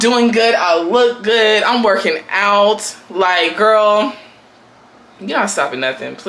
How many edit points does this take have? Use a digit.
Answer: 0